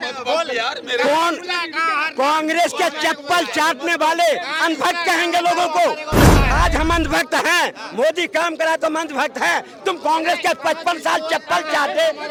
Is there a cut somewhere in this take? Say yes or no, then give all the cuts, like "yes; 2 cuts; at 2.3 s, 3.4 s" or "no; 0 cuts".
no; 0 cuts